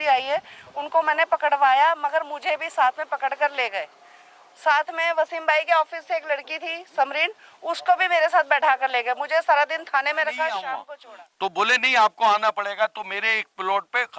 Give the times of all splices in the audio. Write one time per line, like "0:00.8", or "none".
0:10.8